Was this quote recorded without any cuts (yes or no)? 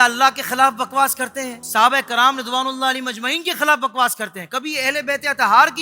no